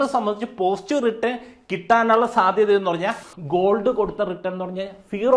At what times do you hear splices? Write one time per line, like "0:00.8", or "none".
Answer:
0:03.2